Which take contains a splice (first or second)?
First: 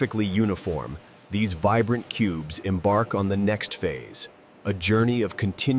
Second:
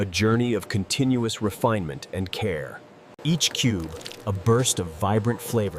second